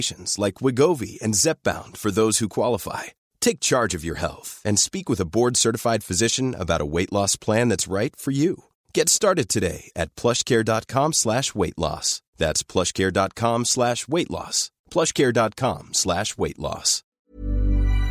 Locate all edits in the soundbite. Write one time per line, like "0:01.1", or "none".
0:17.1